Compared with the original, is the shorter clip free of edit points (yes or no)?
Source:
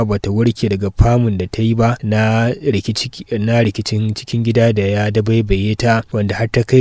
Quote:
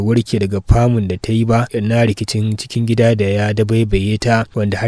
no